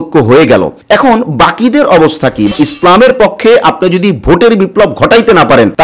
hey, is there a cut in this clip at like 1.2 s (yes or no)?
no